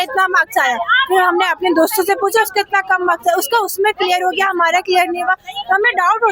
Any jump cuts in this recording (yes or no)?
no